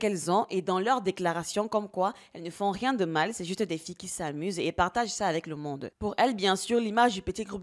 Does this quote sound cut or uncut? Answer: cut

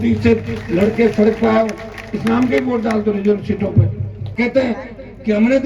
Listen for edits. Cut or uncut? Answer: cut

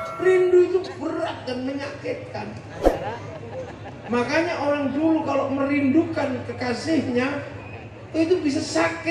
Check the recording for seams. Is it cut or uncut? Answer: uncut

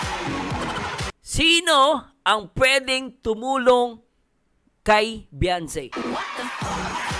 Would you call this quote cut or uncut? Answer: cut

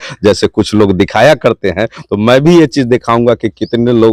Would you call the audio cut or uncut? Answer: uncut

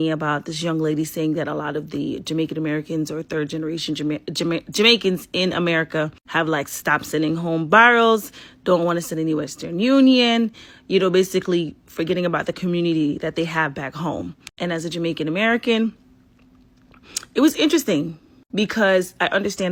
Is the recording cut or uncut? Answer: uncut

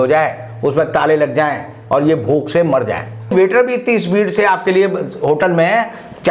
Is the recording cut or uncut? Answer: cut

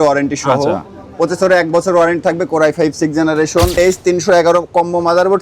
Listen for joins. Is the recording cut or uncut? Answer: cut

